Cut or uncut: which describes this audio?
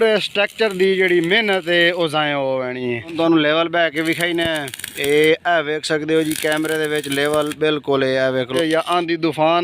cut